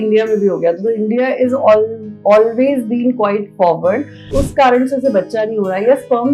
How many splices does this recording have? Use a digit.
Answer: 1